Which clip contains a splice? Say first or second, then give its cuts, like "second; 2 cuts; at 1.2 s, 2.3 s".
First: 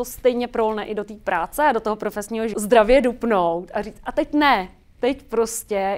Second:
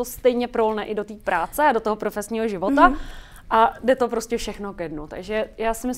first; 1 cut; at 2.5 s